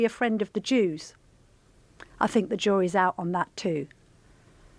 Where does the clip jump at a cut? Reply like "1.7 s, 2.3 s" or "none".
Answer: none